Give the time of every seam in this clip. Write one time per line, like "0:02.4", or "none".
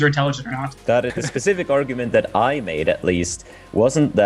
0:01.2